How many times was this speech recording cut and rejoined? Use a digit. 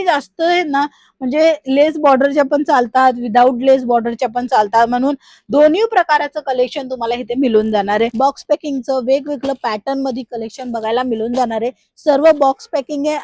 1